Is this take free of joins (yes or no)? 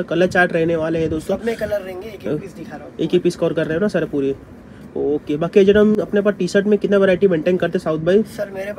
yes